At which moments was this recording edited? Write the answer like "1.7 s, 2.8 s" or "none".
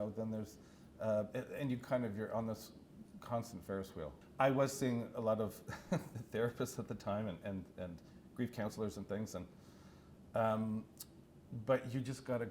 4.2 s